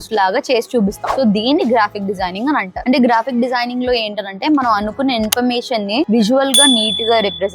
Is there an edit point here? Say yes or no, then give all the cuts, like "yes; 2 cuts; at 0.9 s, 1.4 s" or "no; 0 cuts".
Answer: no; 0 cuts